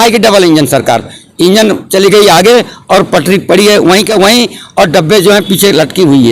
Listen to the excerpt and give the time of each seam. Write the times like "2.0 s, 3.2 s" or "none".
none